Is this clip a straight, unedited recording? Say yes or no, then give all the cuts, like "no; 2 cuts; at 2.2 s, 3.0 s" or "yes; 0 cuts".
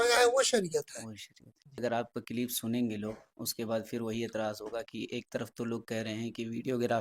no; 1 cut; at 1.8 s